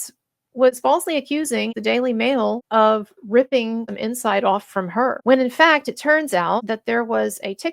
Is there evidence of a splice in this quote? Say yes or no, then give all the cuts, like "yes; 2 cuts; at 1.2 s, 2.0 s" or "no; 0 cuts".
yes; 4 cuts; at 2.6 s, 3.9 s, 5.2 s, 6.6 s